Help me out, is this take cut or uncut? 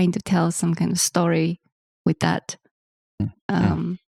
uncut